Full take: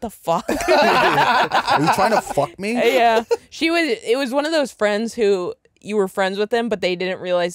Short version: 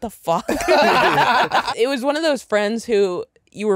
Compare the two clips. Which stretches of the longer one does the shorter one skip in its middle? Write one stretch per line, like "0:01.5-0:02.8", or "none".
0:01.7-0:04.0